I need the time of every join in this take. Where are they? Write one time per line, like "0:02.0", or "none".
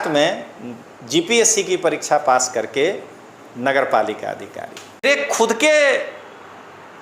0:05.0